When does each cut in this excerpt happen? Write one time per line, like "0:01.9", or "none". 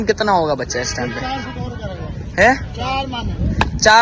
none